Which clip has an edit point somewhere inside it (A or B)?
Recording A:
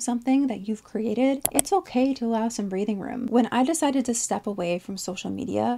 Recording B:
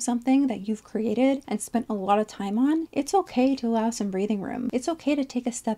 A